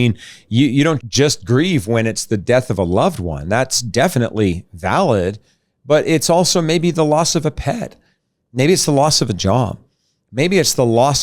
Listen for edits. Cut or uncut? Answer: cut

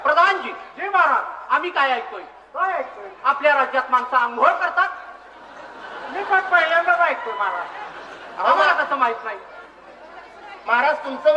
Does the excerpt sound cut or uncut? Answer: uncut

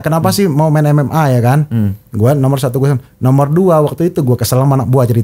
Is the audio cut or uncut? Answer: uncut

